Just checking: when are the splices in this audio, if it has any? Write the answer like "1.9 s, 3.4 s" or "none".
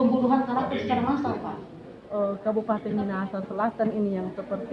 1.5 s